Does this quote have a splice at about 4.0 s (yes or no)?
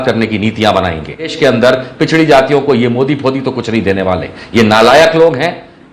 no